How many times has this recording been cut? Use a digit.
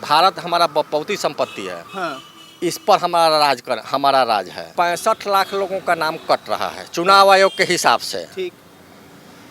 1